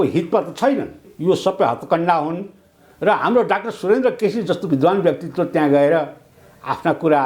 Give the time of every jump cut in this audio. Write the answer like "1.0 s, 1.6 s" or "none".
1.1 s